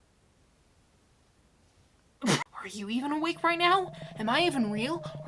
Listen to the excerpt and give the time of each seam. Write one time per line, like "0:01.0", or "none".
0:02.5